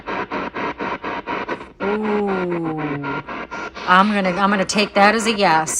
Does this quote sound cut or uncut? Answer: cut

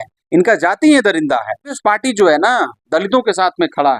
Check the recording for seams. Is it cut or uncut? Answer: cut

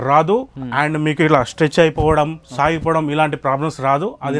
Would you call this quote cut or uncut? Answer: uncut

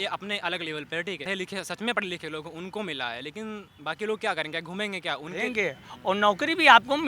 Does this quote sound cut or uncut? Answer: cut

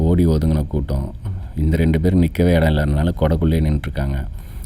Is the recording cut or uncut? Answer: uncut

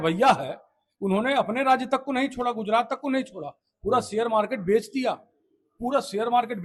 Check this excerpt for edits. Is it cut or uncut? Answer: uncut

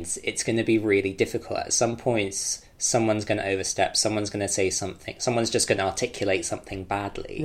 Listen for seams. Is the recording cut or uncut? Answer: uncut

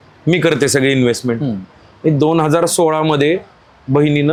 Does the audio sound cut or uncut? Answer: uncut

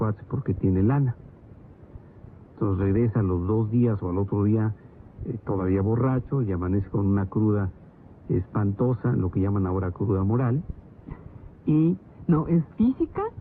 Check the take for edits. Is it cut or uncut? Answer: uncut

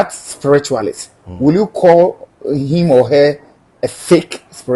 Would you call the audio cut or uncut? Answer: uncut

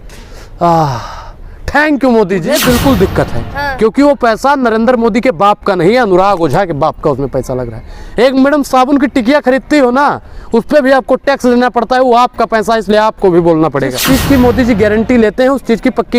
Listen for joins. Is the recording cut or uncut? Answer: cut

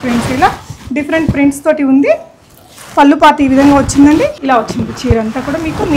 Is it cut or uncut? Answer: cut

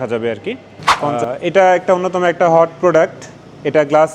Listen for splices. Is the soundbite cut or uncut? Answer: cut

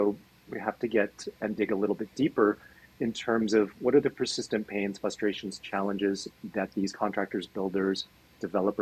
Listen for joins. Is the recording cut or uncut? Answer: uncut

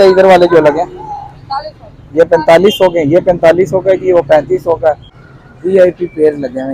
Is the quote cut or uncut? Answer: cut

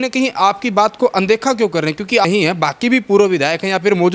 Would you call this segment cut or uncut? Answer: cut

